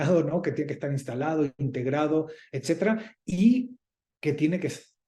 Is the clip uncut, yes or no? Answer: yes